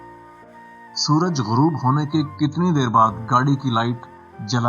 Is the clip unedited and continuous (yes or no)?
no